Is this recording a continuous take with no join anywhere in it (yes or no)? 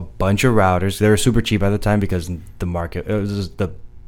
yes